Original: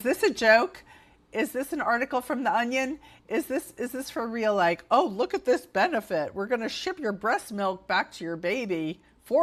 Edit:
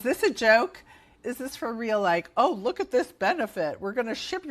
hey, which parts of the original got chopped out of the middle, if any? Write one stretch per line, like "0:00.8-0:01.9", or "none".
0:01.2-0:03.7